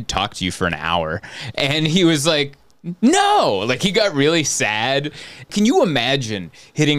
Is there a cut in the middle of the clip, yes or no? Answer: yes